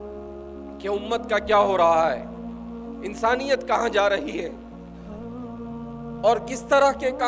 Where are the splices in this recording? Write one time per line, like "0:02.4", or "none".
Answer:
0:04.5
0:05.9

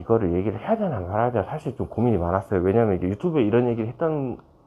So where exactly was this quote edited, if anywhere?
none

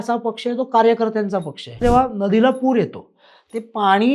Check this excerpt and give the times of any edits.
0:01.8

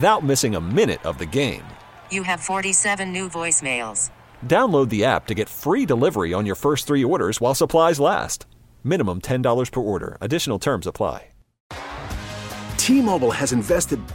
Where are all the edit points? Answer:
0:11.7

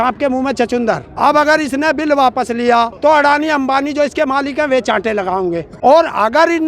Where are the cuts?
0:01.1
0:02.9
0:05.7

